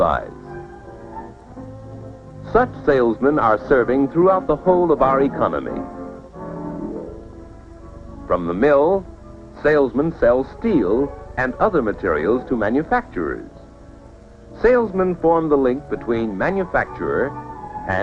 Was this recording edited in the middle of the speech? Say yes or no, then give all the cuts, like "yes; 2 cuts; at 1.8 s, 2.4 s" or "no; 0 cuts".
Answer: no; 0 cuts